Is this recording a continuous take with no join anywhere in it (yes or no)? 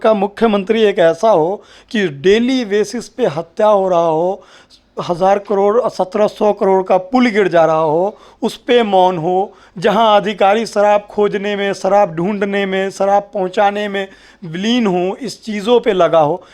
yes